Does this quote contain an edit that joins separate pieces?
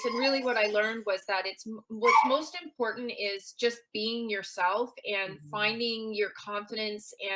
no; 0 cuts

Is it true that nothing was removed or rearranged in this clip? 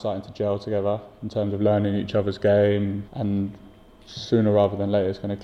no; 1 cut; at 3.0 s

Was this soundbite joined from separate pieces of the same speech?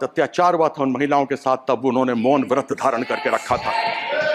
no; 0 cuts

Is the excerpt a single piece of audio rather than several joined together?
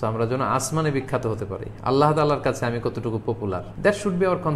no; 1 cut; at 3.7 s

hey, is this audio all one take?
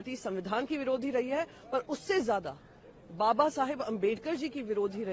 yes; 0 cuts

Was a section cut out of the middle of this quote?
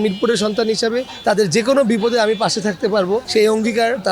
yes; 2 cuts; at 1.1 s, 3.3 s

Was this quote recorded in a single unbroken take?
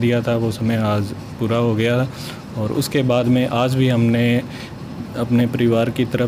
yes; 0 cuts

